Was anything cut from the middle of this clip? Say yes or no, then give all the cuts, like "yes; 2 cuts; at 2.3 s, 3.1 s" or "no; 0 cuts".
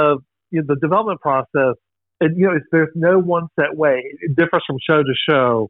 no; 0 cuts